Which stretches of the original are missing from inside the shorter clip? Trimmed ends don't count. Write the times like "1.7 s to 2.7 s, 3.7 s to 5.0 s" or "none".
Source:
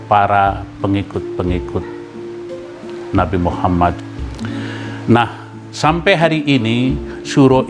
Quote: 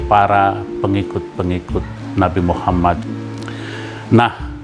2.0 s to 2.9 s